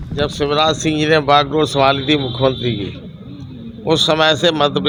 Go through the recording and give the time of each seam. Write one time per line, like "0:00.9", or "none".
none